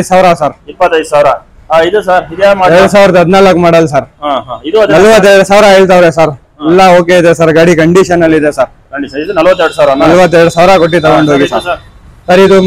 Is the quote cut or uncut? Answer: uncut